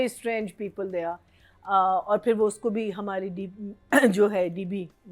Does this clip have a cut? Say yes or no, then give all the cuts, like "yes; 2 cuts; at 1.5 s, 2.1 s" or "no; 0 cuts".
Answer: no; 0 cuts